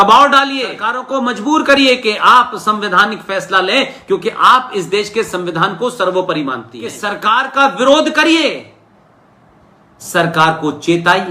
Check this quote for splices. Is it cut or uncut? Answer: cut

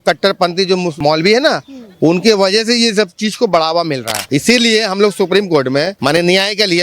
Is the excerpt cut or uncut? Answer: cut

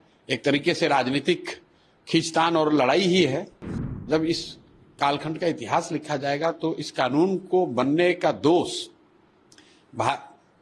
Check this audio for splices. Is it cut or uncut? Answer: cut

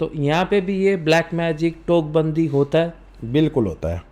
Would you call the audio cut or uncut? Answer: uncut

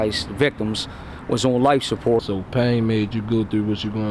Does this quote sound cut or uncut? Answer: cut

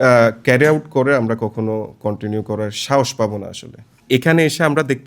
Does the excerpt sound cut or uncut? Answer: cut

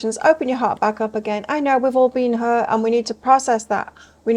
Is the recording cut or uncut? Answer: uncut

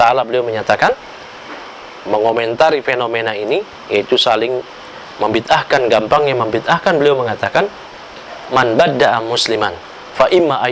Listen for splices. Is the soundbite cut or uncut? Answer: uncut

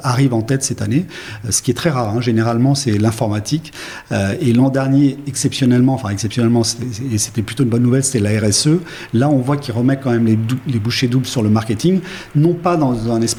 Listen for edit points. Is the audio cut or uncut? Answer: uncut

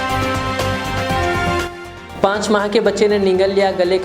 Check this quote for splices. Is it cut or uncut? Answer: cut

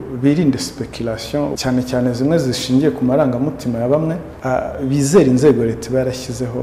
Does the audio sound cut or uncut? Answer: cut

